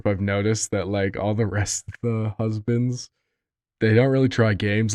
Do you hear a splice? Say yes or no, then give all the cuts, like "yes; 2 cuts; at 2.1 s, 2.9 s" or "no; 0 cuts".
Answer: no; 0 cuts